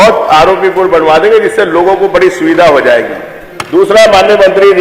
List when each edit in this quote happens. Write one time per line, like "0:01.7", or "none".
none